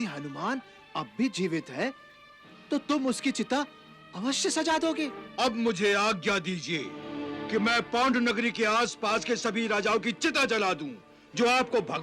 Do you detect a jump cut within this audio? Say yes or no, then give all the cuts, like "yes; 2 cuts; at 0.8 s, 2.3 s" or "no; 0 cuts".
yes; 1 cut; at 5.2 s